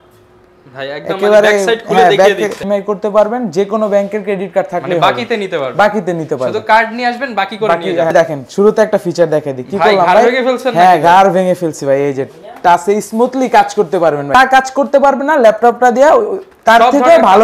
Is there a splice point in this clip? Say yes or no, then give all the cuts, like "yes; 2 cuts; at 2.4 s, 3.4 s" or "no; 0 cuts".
yes; 3 cuts; at 2.6 s, 8.1 s, 14.3 s